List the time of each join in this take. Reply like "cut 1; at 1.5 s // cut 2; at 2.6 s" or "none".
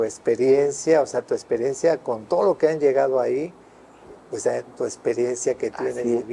none